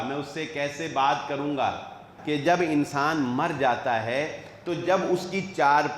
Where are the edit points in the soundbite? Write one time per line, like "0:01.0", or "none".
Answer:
0:02.1